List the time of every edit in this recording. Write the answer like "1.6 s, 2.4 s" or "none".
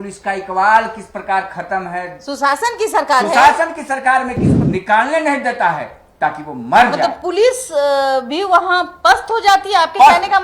4.5 s